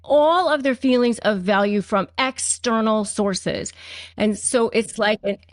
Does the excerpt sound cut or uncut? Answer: uncut